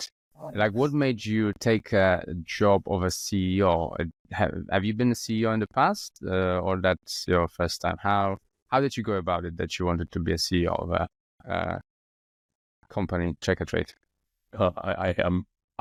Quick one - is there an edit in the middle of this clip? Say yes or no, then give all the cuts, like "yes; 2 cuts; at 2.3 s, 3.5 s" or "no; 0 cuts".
no; 0 cuts